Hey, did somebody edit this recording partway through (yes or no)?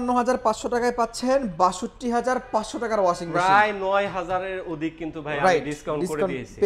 no